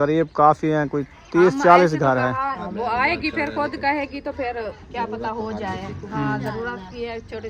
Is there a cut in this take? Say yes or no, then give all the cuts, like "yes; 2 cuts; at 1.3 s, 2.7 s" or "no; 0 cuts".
yes; 2 cuts; at 2.4 s, 6.0 s